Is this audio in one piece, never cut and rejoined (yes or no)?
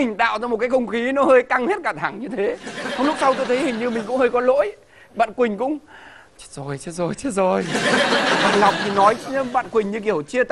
yes